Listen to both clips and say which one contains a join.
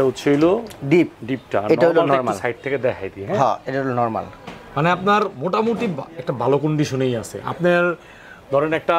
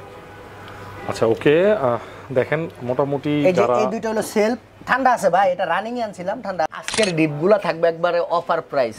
second; 1 cut; at 6.7 s

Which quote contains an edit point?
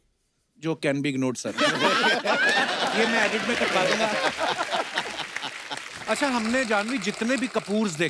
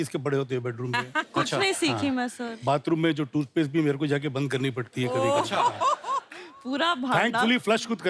first; 1 cut; at 5.9 s

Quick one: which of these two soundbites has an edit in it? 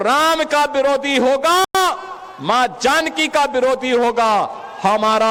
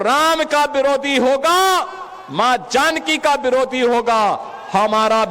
second; 1 cut; at 1.6 s

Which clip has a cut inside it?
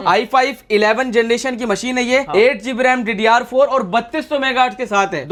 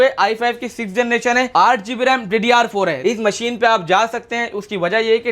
second; 2 cuts; at 1.5 s, 3.0 s

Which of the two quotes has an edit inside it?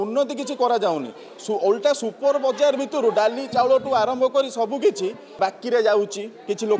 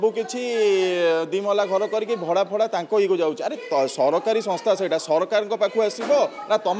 first; 1 cut; at 5.4 s

